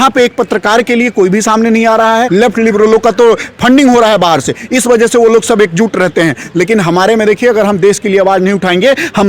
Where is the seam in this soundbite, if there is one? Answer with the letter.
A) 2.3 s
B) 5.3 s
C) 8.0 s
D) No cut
A